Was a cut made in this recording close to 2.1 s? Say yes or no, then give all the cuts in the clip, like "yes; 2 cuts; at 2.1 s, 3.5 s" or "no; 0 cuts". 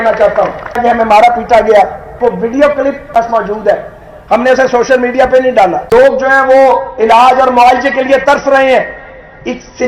yes; 4 cuts; at 0.8 s, 2.1 s, 3.2 s, 5.8 s